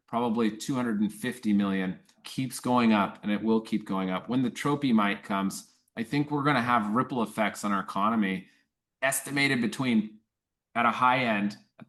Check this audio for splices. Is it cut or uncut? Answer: uncut